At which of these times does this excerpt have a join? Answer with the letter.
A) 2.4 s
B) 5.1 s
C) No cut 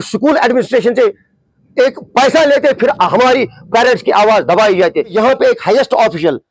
B